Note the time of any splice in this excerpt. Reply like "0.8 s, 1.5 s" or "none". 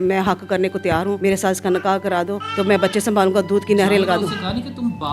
1.2 s, 2.4 s